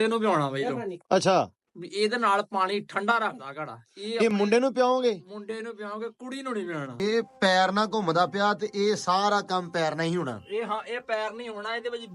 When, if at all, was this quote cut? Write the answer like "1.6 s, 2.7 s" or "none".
7.0 s

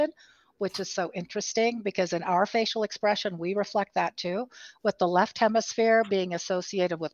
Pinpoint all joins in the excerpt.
none

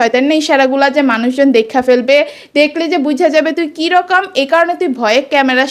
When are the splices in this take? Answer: none

